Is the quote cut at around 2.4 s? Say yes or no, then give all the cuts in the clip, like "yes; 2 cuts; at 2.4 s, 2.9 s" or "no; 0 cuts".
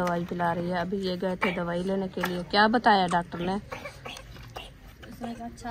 no; 1 cut; at 3.7 s